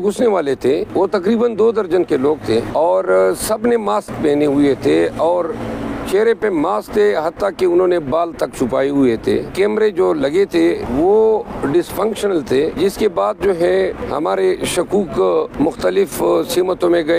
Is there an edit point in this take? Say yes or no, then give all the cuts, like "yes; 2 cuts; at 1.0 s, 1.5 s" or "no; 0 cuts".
yes; 7 cuts; at 1.3 s, 2.7 s, 9.5 s, 10.8 s, 12.7 s, 14.0 s, 15.5 s